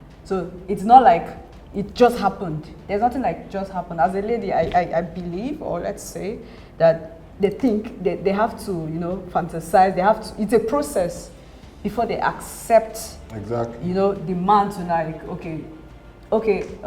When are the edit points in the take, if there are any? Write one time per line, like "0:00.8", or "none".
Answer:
none